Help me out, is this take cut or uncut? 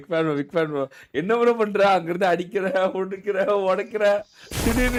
uncut